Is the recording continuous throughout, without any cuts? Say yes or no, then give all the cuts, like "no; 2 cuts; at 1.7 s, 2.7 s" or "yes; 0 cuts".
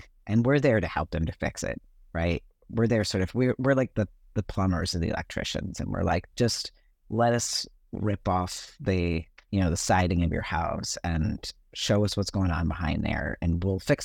yes; 0 cuts